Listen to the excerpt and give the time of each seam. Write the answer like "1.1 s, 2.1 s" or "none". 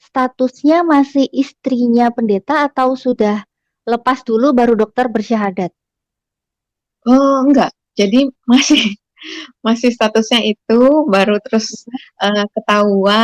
none